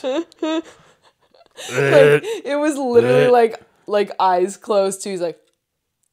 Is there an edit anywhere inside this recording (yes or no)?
no